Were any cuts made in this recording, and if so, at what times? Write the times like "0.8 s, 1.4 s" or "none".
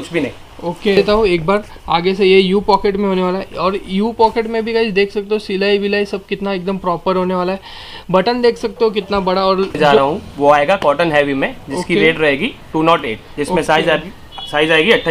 1.0 s, 9.8 s